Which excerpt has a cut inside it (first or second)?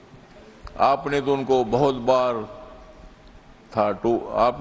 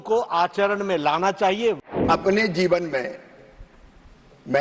second